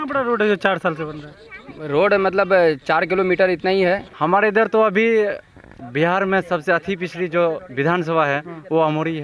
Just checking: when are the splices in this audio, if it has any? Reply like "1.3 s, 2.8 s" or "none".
4.1 s